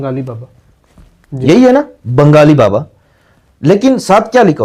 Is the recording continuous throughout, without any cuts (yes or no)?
yes